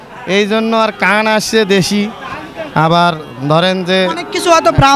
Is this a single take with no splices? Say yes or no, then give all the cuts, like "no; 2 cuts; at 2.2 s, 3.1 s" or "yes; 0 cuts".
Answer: yes; 0 cuts